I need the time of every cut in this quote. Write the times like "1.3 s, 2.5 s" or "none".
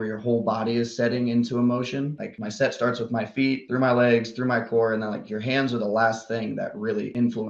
none